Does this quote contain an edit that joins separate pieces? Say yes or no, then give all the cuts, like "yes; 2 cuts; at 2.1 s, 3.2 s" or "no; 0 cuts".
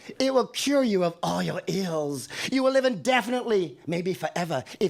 no; 0 cuts